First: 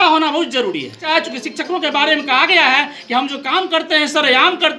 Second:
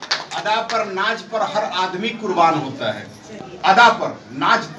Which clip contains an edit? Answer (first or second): first